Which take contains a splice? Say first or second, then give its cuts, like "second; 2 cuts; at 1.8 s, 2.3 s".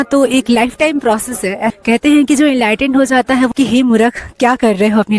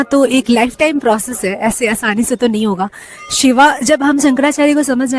first; 2 cuts; at 1.8 s, 3.5 s